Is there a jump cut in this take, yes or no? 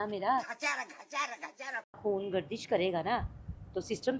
yes